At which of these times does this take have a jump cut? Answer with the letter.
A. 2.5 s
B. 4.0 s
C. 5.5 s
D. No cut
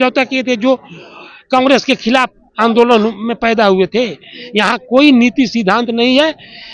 D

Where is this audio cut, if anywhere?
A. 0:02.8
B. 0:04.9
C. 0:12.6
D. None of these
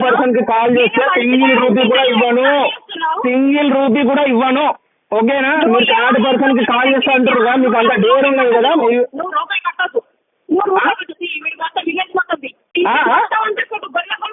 C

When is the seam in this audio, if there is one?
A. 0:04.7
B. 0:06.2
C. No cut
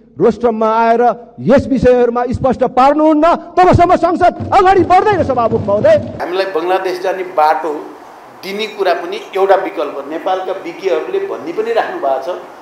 B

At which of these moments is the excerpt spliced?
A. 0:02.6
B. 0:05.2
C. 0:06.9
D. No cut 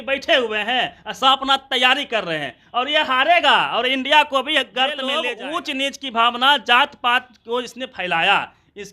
B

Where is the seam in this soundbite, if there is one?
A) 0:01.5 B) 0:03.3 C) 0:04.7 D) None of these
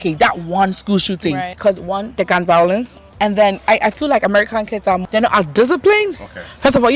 A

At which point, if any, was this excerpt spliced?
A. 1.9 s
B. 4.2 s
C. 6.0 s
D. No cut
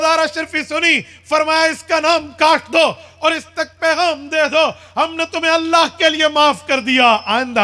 D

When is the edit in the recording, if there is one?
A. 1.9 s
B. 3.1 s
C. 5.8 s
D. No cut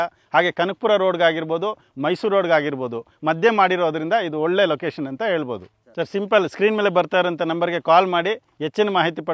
C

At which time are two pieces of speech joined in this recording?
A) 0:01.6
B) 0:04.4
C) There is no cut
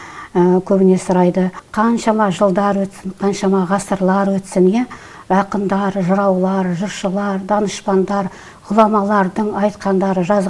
A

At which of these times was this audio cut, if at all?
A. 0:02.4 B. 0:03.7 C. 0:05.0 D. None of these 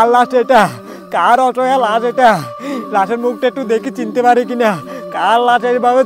D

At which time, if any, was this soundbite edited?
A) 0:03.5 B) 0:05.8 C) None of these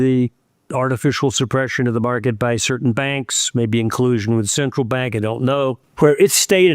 B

